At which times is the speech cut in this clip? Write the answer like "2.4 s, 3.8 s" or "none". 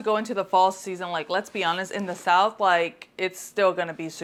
none